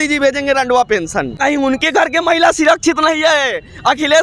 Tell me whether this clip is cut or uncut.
cut